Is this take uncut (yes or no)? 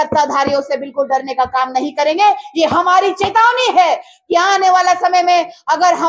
yes